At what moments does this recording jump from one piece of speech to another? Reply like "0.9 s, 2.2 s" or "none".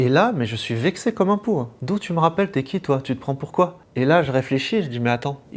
1.8 s, 3.8 s